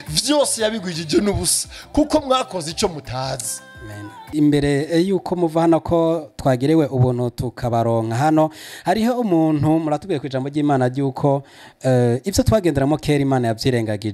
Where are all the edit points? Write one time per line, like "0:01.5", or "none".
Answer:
0:04.3